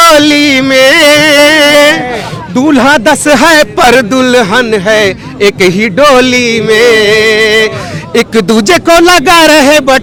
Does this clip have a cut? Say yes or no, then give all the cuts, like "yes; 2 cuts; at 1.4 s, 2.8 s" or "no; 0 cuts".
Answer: no; 0 cuts